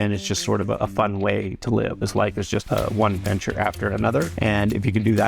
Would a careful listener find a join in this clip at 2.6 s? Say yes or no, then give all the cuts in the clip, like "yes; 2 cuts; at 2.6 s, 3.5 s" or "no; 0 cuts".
yes; 2 cuts; at 2.6 s, 4.3 s